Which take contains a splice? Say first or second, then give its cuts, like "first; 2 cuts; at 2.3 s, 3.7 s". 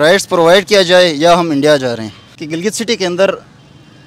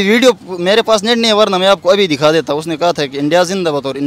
first; 1 cut; at 2.4 s